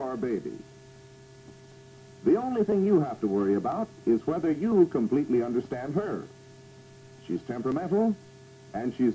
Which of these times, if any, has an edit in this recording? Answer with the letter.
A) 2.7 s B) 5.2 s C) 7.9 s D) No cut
A